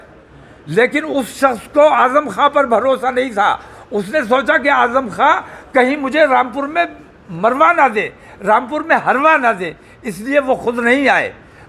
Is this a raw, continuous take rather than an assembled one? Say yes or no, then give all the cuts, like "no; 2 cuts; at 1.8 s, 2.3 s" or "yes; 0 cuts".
yes; 0 cuts